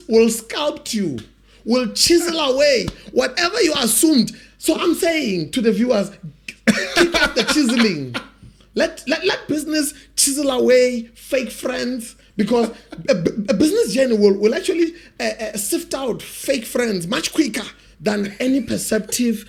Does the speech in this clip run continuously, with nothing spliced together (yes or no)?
yes